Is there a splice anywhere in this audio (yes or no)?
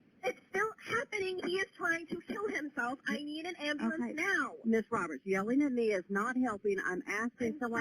yes